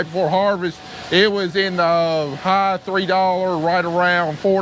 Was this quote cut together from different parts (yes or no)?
no